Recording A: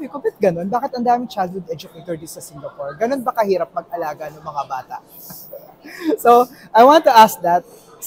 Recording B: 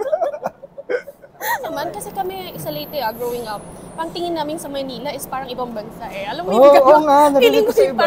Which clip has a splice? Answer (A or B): B